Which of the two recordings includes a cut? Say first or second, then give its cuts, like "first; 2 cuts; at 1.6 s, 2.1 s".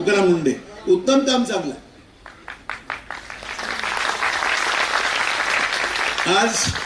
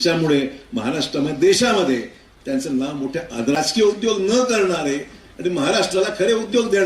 second; 1 cut; at 3.6 s